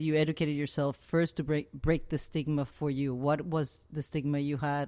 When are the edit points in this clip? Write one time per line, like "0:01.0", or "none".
none